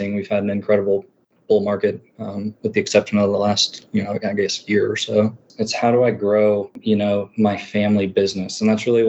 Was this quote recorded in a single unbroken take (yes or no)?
no